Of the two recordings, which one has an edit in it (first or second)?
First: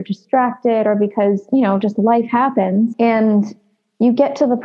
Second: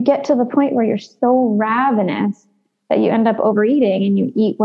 first